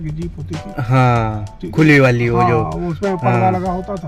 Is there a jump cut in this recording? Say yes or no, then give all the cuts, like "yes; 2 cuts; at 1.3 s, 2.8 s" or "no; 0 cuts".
no; 0 cuts